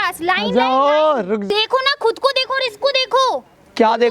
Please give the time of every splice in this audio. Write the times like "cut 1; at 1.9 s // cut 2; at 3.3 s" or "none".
cut 1; at 1.4 s